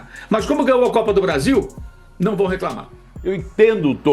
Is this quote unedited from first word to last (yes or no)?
yes